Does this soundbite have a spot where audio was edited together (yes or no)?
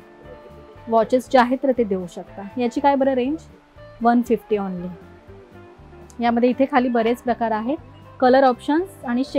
no